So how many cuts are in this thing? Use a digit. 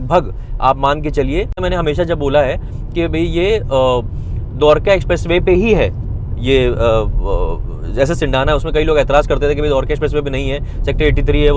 1